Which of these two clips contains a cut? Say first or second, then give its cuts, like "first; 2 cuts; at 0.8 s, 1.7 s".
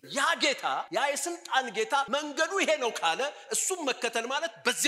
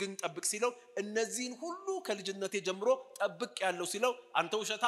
first; 2 cuts; at 0.9 s, 2.1 s